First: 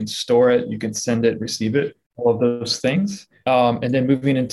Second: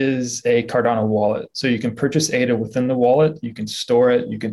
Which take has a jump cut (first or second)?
first